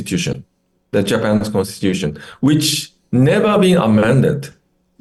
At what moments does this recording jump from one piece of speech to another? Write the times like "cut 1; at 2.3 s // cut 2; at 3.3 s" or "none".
none